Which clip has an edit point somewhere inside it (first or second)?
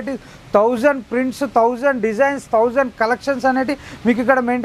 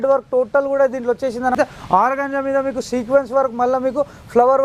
second